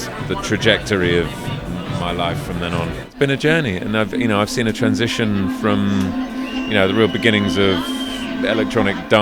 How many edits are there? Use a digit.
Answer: 1